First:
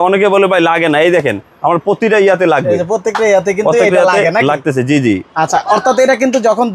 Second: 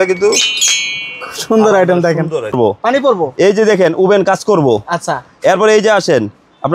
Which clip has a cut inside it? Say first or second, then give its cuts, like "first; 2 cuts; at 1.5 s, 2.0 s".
second; 1 cut; at 2.5 s